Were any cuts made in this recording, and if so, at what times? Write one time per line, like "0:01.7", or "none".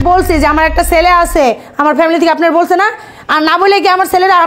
none

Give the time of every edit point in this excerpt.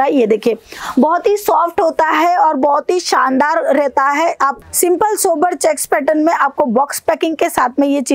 0:04.6

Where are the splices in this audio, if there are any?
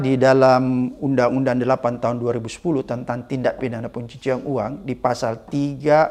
none

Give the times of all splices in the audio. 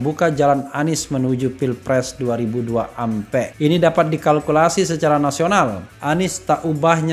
0:03.5
0:05.9

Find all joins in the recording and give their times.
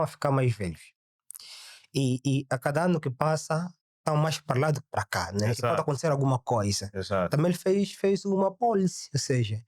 none

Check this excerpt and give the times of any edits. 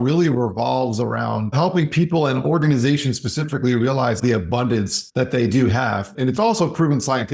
0:01.5
0:04.7
0:06.1

